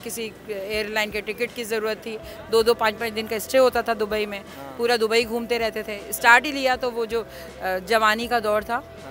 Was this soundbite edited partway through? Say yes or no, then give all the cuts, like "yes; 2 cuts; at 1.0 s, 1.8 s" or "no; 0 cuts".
no; 0 cuts